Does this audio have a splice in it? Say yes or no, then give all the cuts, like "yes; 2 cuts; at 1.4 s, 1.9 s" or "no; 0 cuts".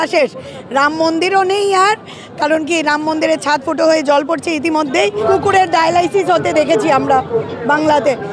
yes; 1 cut; at 5.2 s